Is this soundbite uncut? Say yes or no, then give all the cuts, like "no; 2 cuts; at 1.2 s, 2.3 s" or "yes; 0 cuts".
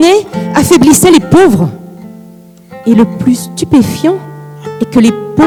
yes; 0 cuts